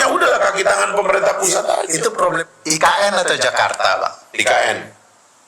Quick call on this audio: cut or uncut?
cut